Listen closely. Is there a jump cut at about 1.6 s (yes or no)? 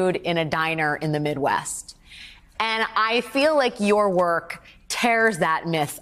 no